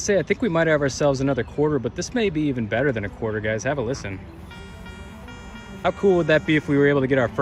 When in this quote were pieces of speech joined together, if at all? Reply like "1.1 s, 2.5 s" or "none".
5.9 s